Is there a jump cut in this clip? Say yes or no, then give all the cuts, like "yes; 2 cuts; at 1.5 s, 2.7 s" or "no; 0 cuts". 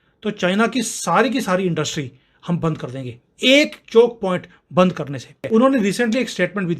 yes; 1 cut; at 5.5 s